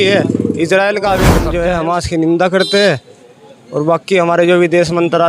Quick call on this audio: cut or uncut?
cut